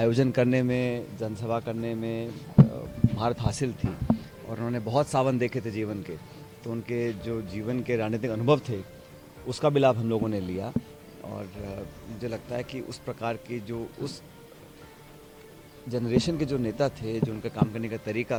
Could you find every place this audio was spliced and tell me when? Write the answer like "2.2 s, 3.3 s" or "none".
none